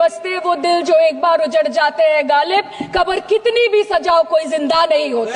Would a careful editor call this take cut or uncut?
uncut